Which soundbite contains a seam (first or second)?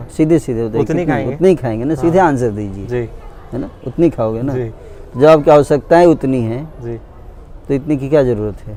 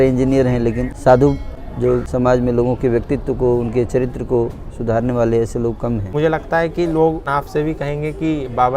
second